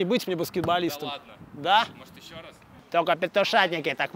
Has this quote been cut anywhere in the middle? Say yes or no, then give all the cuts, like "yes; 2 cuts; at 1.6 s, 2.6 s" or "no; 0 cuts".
yes; 1 cut; at 2.7 s